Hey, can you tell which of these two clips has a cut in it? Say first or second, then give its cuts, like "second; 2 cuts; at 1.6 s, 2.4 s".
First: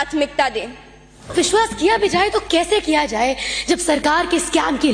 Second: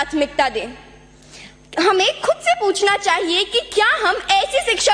first; 1 cut; at 1.3 s